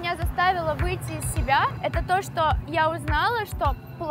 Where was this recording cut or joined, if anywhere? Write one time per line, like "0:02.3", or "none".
0:01.8

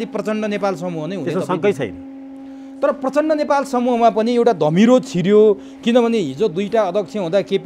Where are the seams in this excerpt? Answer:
none

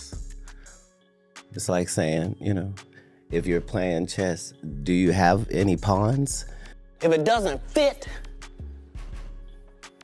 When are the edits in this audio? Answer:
0:06.7

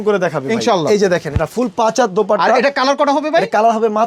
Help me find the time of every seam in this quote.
none

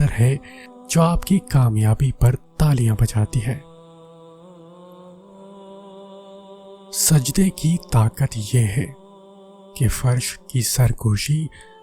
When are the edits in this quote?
0:03.6
0:05.6
0:07.1

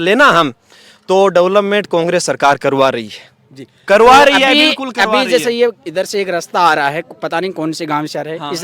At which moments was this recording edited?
none

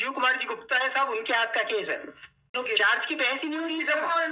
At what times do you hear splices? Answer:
0:02.5

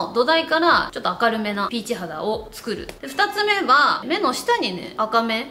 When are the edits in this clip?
0:00.9
0:02.9
0:04.0

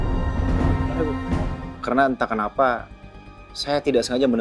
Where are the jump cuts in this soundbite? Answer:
0:01.6

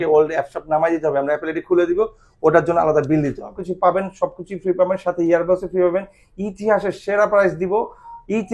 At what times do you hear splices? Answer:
0:03.6

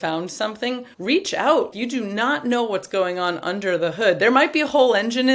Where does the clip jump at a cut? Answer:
0:00.9
0:01.7

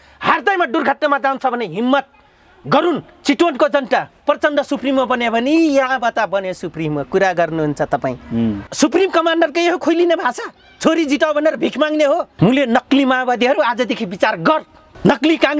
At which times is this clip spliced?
0:04.2
0:08.7
0:12.3

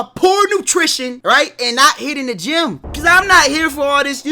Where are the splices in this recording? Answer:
0:01.2
0:02.9

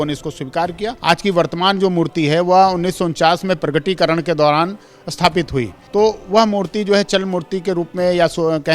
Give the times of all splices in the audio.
0:01.0
0:05.8

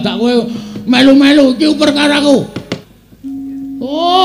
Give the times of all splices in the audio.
0:02.8

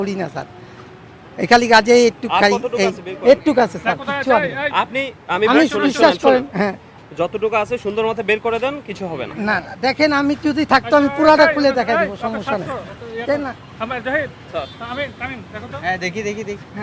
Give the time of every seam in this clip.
none

